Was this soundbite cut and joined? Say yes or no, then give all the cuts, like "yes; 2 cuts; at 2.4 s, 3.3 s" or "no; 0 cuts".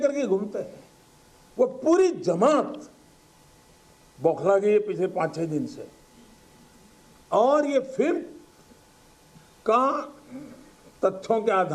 no; 0 cuts